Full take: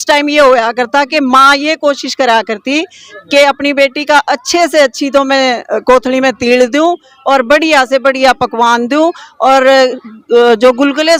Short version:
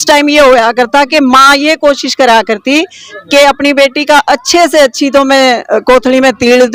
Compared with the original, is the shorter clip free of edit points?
yes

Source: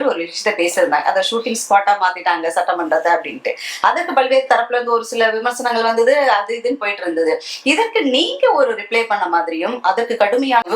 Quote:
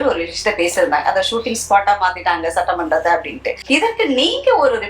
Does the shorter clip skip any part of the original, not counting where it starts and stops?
yes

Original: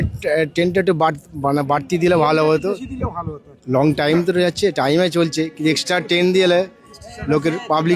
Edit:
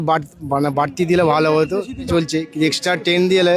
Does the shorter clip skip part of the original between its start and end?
yes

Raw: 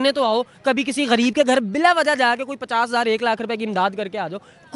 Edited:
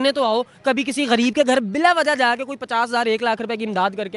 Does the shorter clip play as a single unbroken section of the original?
yes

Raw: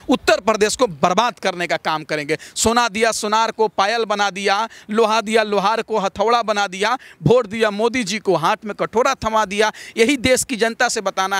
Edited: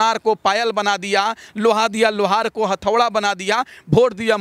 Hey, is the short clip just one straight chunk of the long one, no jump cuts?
yes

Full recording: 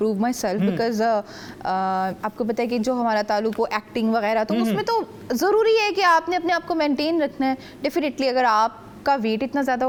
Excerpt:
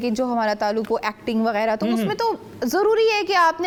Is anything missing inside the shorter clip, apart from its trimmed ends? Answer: no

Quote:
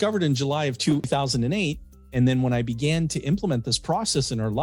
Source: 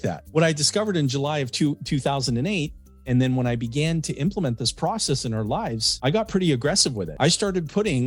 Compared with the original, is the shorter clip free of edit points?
no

